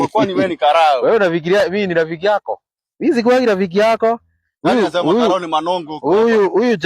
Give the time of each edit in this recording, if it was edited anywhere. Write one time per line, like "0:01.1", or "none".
0:01.6

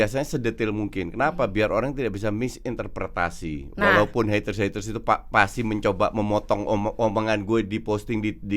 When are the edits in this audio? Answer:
none

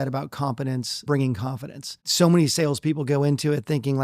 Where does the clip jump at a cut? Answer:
0:01.0
0:02.0

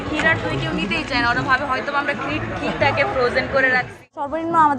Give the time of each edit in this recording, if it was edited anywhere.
0:03.9

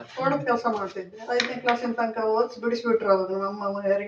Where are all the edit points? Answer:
0:01.1

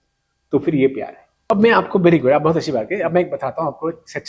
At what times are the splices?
0:01.5

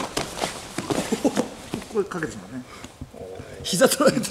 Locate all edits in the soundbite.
none

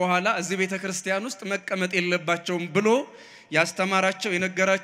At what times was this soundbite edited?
none

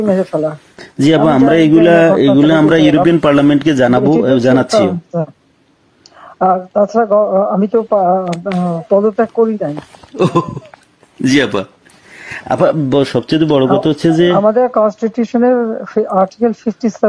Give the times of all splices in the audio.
none

